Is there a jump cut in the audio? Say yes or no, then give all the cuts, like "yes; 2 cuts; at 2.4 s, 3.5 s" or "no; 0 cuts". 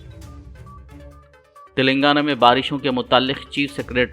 yes; 1 cut; at 1.3 s